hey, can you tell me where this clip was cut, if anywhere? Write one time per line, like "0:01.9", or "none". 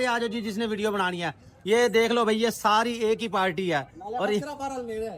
none